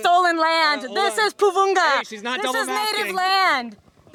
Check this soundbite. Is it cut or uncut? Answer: uncut